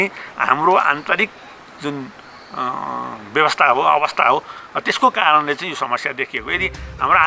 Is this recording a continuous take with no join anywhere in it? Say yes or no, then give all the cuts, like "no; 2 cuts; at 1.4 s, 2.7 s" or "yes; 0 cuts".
yes; 0 cuts